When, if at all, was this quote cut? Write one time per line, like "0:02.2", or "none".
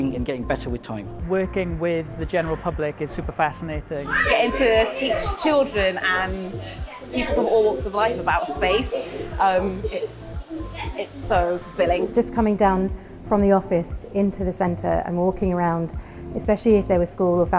0:01.1
0:04.1
0:12.1